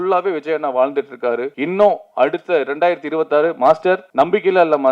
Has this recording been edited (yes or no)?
yes